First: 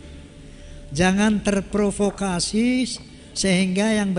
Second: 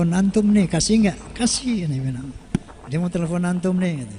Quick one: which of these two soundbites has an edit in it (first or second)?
second